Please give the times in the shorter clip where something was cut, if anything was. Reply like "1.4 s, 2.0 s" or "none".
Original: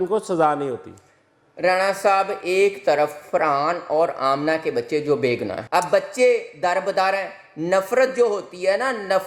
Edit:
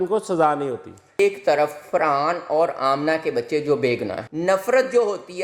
1.2 s, 4.2 s